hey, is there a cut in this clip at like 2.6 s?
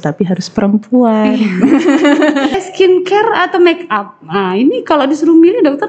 yes; 1 cut; at 2.6 s

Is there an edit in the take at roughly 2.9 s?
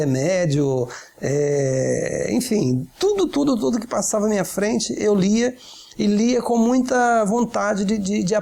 no; 0 cuts

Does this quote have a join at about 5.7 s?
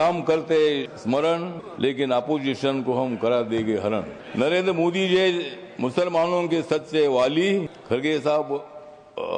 no; 4 cuts; at 0.9 s, 1.6 s, 4.2 s, 7.8 s

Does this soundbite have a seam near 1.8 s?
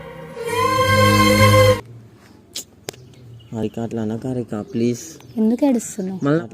yes; 1 cut; at 1.8 s

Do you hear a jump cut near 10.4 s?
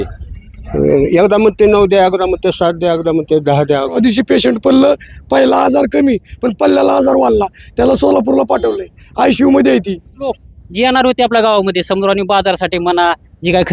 yes; 2 cuts; at 4.0 s, 10.4 s

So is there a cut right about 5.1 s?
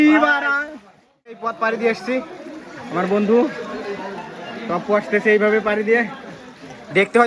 no; 1 cut; at 1.5 s

